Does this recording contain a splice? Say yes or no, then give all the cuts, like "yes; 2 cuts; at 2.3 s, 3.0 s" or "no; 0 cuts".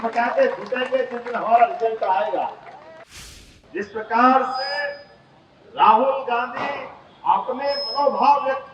yes; 1 cut; at 3.0 s